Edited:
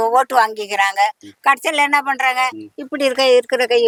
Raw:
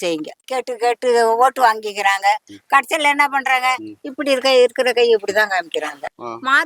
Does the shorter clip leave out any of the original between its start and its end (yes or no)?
no